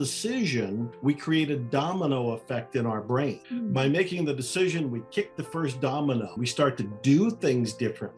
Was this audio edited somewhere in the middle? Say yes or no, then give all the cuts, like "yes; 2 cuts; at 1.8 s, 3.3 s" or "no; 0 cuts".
yes; 3 cuts; at 0.9 s, 3.4 s, 6.4 s